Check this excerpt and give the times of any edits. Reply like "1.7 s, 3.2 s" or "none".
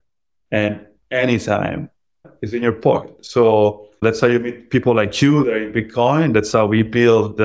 2.3 s, 4.0 s

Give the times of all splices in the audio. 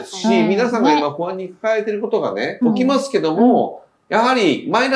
2.6 s

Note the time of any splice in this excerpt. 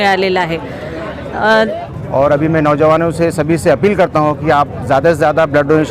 1.9 s

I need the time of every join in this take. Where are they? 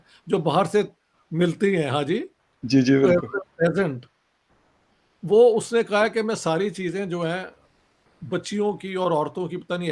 none

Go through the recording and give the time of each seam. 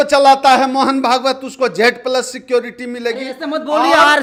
none

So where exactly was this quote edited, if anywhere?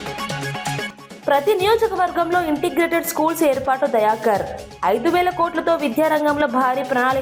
none

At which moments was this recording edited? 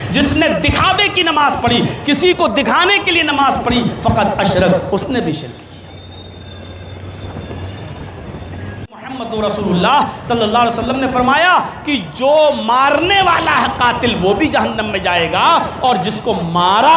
9.2 s

